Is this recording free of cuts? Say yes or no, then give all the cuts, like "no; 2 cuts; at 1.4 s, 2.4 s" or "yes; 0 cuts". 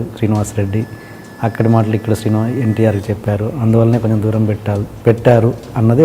yes; 0 cuts